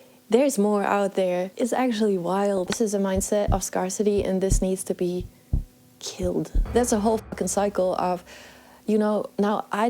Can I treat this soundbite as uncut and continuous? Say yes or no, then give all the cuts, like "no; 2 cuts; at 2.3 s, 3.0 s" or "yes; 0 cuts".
no; 3 cuts; at 1.5 s, 2.7 s, 6.6 s